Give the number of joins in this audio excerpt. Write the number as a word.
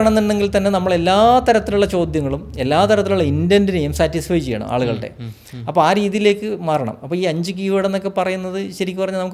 zero